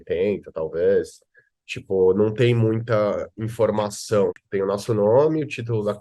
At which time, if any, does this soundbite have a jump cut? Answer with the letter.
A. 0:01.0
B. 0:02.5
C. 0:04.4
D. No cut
C